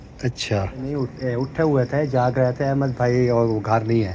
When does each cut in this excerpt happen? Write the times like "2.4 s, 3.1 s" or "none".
0.9 s